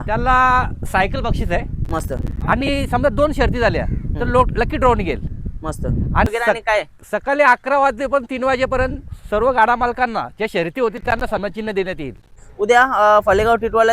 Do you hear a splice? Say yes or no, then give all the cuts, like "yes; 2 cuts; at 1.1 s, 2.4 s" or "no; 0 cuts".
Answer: yes; 2 cuts; at 6.3 s, 12.4 s